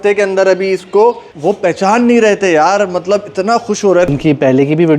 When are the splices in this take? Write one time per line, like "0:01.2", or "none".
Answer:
0:01.3
0:04.1